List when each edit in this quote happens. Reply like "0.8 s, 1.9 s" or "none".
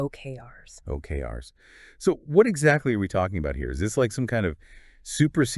2.8 s